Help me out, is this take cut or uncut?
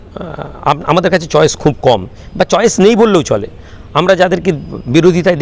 uncut